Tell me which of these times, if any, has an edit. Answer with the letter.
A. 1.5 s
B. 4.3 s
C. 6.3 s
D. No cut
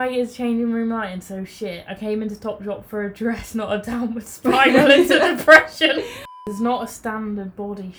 C